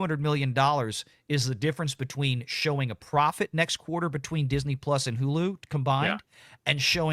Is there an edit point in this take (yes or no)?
no